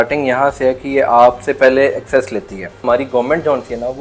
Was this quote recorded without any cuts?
no; 1 cut; at 2.8 s

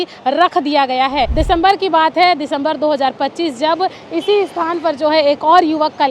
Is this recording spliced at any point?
yes; 1 cut; at 1.3 s

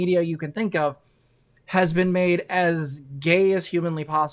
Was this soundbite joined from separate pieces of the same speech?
no; 0 cuts

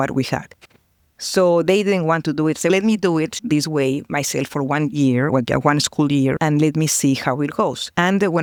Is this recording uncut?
yes; 0 cuts

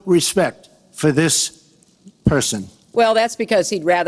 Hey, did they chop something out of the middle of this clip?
yes; 1 cut; at 2.8 s

